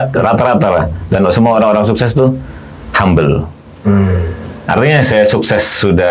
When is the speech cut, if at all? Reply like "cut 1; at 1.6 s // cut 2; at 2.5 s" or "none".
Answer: none